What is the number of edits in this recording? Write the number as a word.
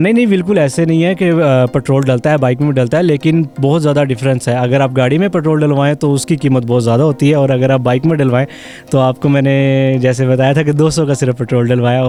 zero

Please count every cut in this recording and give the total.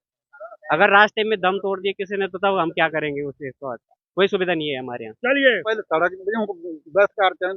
one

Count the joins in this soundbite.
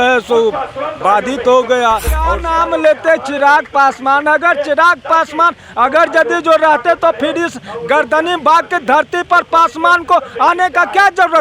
one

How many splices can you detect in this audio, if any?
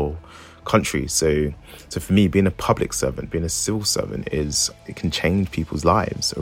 one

